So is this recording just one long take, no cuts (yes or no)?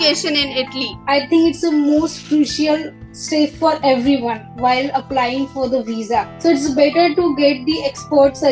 no